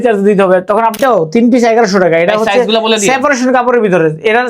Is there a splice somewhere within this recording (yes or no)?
yes